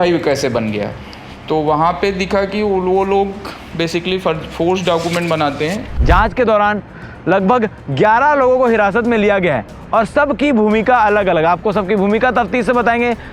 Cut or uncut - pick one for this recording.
cut